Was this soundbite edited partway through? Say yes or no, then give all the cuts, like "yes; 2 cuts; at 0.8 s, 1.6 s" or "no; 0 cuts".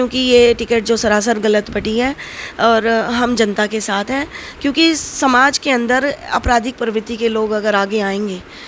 no; 0 cuts